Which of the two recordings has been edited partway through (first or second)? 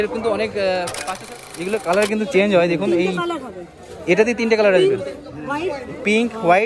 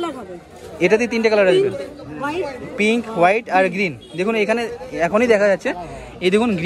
first